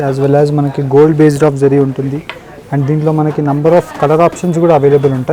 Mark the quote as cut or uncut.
uncut